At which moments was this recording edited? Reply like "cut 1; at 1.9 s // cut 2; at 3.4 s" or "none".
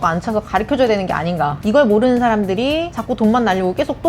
cut 1; at 1.6 s // cut 2; at 2.9 s